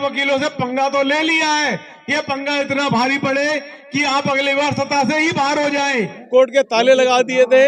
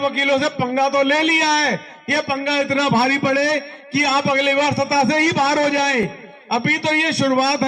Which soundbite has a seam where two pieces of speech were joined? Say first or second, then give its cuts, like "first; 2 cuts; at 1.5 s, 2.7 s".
first; 1 cut; at 6.1 s